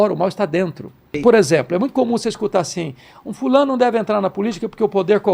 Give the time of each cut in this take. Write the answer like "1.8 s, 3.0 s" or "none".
1.2 s